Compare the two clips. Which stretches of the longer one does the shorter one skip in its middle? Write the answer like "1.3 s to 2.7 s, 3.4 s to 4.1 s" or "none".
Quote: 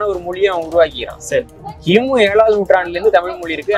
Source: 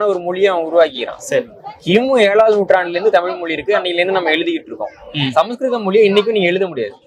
none